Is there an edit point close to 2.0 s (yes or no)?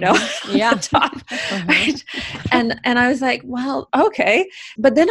no